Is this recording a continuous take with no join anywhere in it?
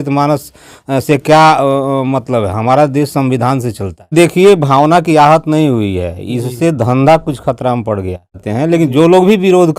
no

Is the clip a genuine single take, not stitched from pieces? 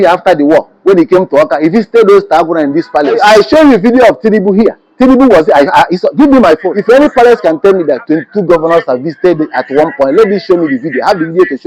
no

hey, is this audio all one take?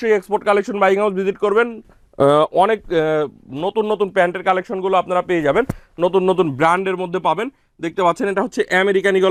yes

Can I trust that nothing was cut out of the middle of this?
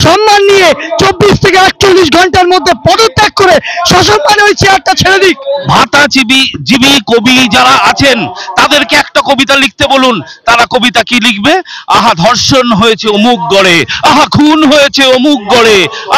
no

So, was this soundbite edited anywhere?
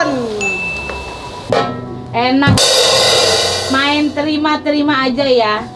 yes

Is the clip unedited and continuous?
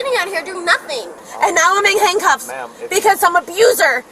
no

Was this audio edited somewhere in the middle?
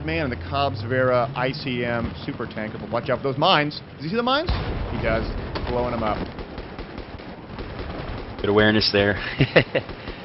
no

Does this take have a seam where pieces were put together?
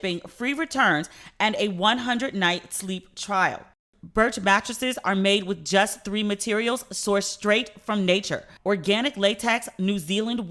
no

